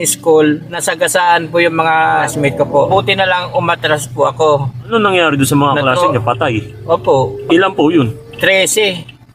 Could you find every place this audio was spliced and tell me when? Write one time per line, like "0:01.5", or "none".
0:00.8
0:02.5
0:04.8